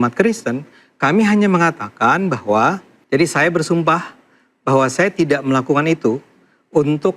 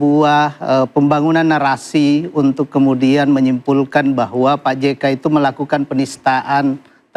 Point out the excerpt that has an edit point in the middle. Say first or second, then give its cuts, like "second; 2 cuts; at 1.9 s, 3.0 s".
first; 1 cut; at 2.9 s